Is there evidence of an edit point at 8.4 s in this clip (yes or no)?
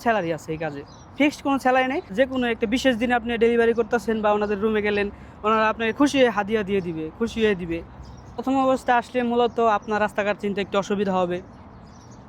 yes